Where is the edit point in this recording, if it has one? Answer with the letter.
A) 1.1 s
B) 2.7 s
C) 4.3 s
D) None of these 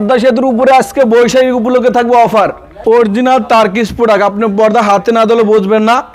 B